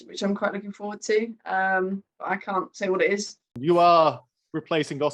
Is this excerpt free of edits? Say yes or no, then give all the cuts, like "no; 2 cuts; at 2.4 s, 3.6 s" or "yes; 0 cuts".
no; 1 cut; at 3.6 s